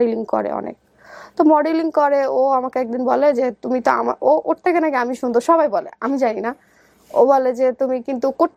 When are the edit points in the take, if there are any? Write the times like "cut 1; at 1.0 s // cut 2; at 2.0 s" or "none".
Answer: none